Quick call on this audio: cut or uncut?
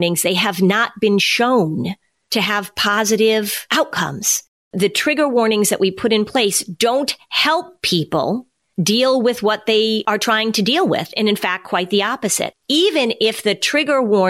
cut